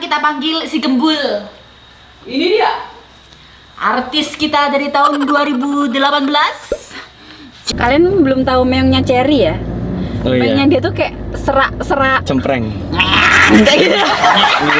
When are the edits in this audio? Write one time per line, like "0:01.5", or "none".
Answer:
0:02.1
0:07.7